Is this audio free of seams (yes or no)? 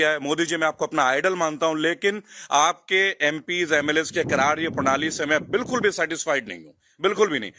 yes